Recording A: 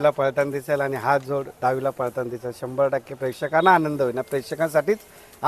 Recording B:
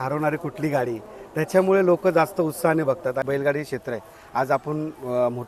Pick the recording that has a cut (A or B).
B